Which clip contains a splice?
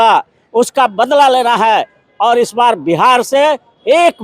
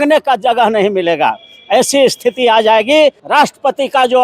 second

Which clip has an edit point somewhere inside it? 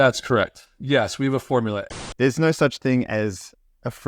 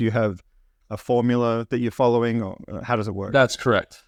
first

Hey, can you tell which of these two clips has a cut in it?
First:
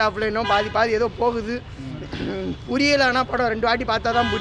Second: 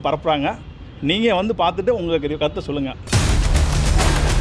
second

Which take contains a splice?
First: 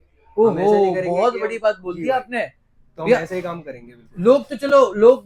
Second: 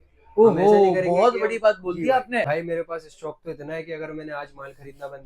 second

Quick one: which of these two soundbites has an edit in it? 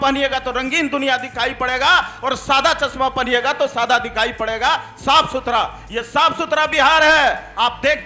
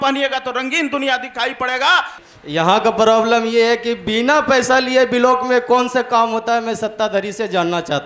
second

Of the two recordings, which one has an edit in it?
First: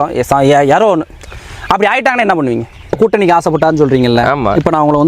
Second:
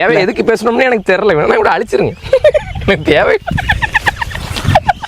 first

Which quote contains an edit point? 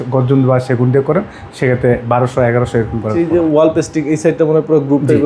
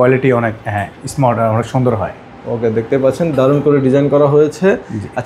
first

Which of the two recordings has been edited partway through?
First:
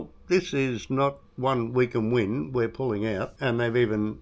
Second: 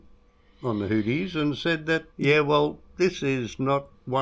first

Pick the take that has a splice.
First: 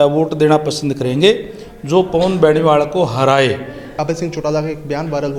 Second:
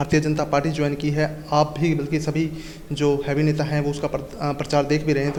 first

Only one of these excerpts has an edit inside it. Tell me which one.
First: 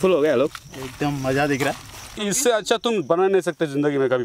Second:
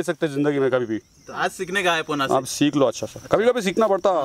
first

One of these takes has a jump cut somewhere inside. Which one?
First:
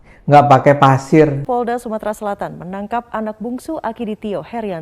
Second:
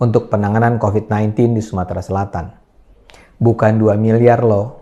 first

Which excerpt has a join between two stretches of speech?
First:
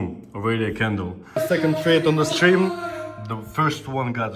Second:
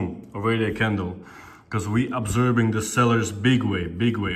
first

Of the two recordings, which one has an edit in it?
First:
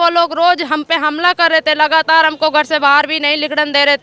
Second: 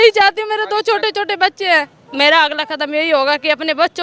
second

